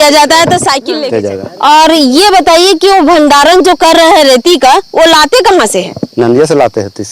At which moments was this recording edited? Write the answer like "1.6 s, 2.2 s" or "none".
0.9 s